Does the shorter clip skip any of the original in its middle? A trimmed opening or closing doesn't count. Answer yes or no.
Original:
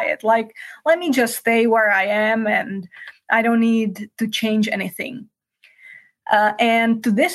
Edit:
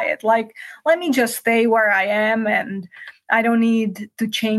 no